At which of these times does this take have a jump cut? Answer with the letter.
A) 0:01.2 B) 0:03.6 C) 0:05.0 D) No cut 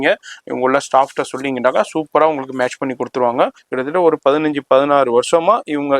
B